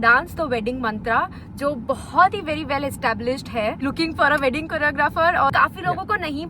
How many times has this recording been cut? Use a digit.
2